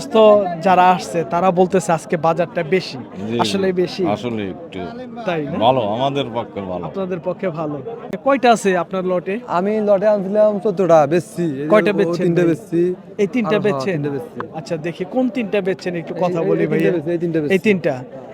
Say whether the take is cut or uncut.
cut